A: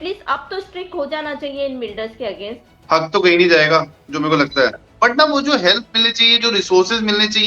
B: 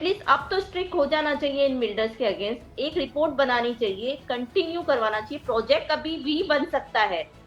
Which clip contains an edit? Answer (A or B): A